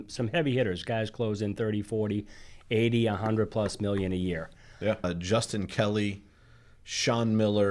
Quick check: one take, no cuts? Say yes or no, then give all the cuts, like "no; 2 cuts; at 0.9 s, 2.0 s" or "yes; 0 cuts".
no; 1 cut; at 5.1 s